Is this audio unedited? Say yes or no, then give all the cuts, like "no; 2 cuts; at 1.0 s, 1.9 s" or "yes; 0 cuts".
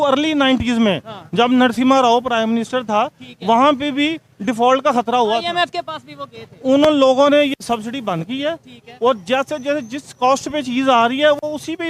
yes; 0 cuts